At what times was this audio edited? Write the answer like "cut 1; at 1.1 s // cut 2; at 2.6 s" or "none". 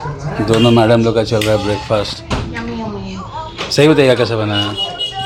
none